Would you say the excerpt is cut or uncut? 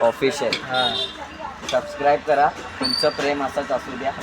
cut